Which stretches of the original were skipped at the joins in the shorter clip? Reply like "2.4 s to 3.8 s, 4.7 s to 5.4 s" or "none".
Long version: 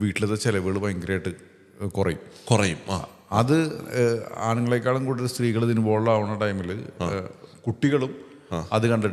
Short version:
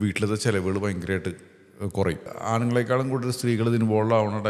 2.3 s to 4.3 s